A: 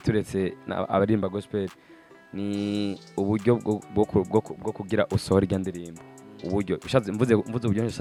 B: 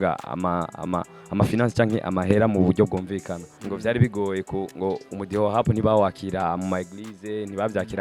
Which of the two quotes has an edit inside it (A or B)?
B